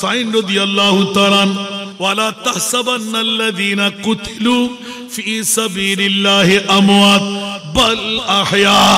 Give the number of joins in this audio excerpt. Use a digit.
1